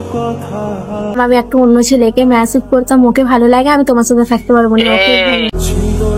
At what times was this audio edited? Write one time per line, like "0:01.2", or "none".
0:01.1